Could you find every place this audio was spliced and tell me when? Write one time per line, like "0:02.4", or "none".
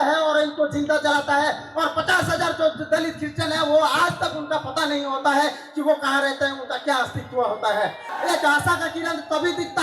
0:08.1

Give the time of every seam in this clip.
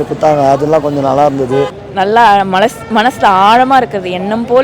0:01.8

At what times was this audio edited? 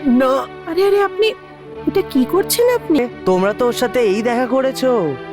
0:03.0

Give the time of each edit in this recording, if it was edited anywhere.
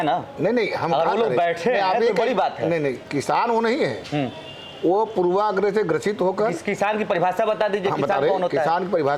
none

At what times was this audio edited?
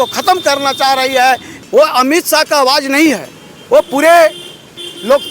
0:01.5

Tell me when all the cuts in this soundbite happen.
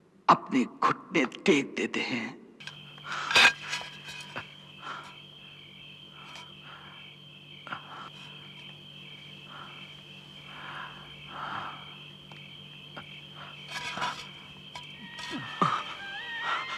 none

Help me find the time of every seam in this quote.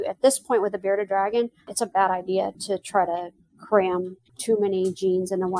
0:01.6
0:02.6
0:04.3

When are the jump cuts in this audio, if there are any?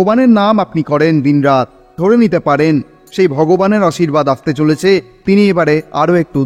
0:01.8
0:05.1

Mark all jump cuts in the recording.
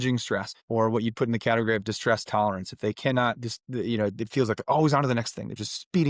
none

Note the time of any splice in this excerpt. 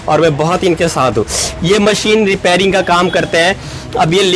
none

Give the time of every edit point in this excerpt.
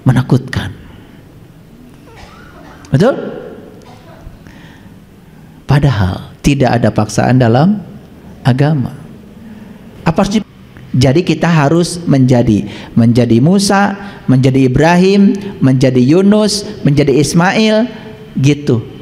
0:10.4

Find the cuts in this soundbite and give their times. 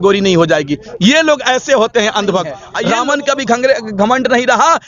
0:02.6

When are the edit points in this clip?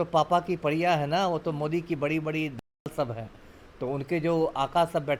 none

